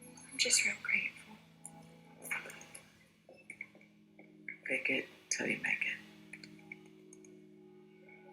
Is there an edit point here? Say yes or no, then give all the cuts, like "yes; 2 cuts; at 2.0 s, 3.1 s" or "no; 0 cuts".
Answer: yes; 1 cut; at 3.0 s